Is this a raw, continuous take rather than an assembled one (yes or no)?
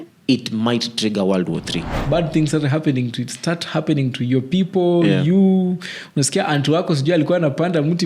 no